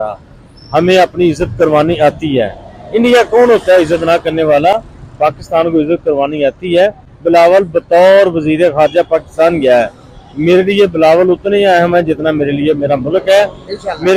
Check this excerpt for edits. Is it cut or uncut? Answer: uncut